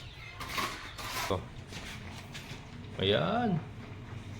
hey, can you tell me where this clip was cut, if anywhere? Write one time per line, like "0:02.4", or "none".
0:01.3